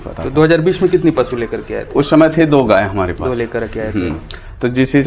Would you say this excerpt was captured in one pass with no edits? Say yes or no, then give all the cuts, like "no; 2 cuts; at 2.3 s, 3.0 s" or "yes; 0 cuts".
yes; 0 cuts